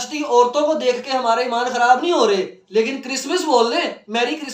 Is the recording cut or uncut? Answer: uncut